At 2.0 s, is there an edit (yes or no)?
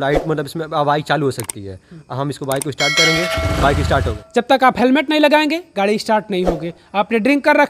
no